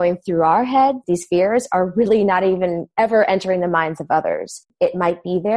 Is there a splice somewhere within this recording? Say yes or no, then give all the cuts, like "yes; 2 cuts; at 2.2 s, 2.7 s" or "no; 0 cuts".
yes; 3 cuts; at 1.0 s, 2.8 s, 4.6 s